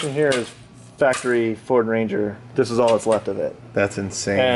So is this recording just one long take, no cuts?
yes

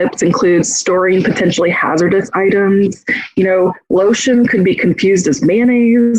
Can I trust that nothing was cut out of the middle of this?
yes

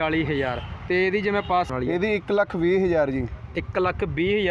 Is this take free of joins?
no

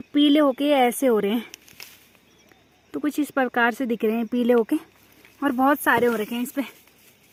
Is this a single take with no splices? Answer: yes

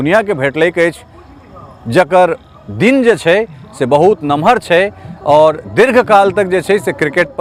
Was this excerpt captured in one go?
yes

